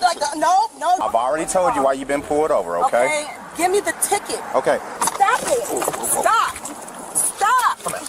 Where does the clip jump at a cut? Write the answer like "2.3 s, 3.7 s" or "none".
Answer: 1.0 s, 4.9 s